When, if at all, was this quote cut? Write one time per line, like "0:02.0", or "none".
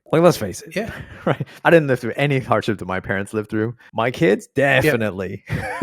0:01.5
0:03.8